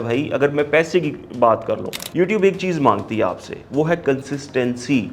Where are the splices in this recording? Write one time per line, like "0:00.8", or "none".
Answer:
0:02.0

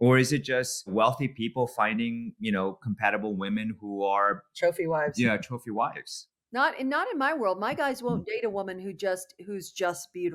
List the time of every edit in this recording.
0:00.9

